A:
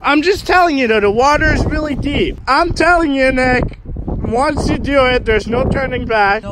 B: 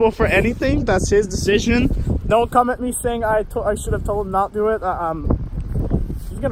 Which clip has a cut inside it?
A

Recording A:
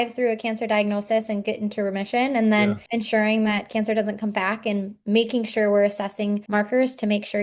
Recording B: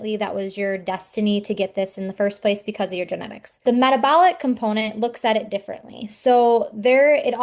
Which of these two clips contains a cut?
A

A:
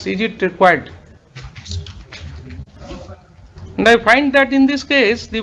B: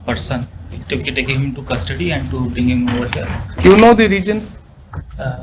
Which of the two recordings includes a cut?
B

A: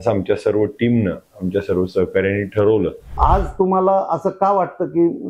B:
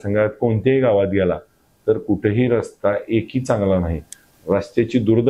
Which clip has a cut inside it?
A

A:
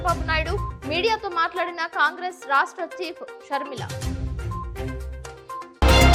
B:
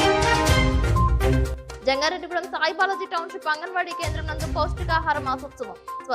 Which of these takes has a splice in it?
B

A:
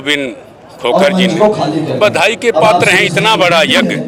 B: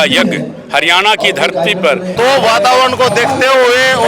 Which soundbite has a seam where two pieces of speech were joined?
B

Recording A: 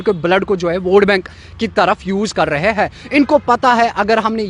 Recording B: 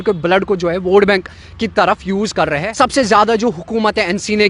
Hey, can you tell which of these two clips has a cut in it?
B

